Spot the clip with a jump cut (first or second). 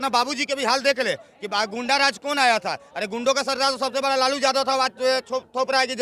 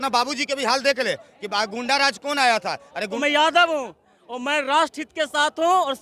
second